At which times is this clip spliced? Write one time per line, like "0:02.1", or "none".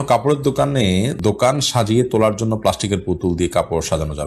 0:01.2